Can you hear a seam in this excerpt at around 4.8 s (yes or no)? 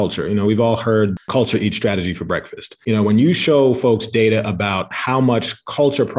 no